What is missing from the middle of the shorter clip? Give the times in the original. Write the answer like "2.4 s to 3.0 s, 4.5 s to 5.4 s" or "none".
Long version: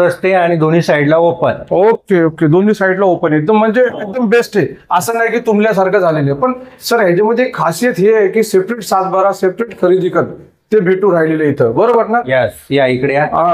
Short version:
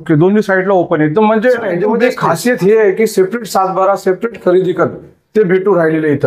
4.0 s to 7.1 s